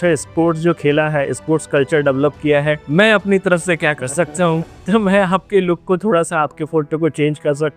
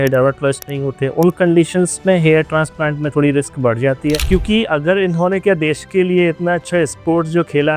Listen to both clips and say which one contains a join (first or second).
second